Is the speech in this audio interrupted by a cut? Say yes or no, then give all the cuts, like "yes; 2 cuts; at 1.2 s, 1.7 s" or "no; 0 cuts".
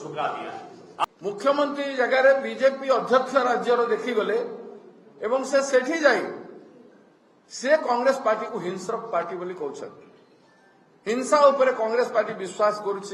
yes; 1 cut; at 1.0 s